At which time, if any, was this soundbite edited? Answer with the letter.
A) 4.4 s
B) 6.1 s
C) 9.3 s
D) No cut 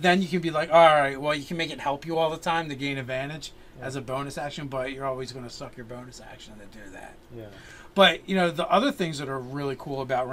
C